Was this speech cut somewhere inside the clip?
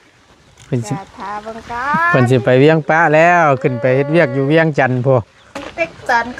no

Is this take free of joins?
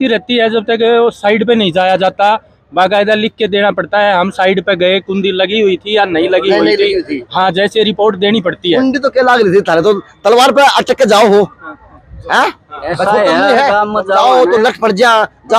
yes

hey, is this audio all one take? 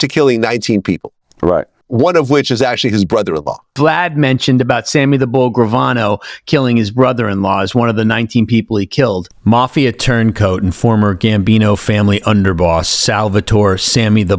yes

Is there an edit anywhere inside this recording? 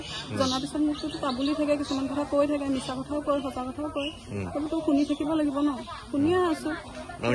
no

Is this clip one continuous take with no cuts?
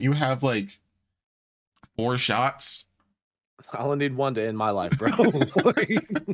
yes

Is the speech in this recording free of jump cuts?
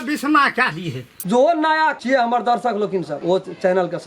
no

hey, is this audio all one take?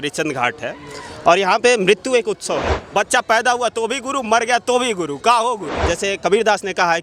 no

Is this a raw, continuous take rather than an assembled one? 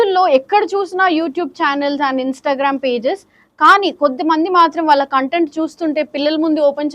yes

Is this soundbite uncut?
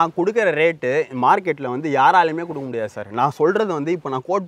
yes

